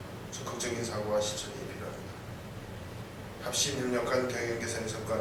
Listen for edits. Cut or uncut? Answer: uncut